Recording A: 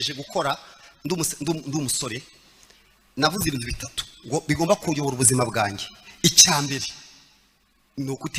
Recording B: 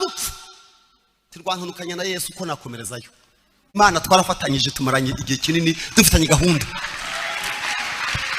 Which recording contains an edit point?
B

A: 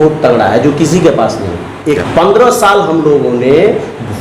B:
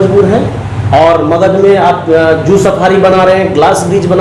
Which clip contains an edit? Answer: A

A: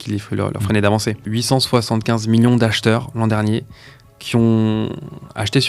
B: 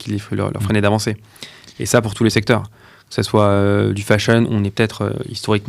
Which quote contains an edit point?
A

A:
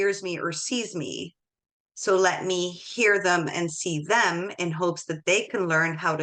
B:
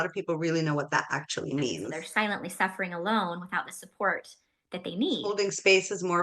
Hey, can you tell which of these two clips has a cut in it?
B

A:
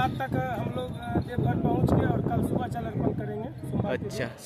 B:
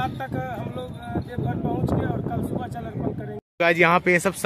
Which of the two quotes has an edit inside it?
B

